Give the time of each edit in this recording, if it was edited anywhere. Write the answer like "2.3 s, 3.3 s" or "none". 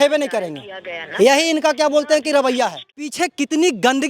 3.1 s